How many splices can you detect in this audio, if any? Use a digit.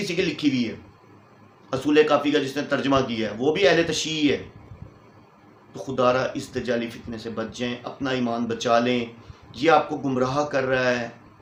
0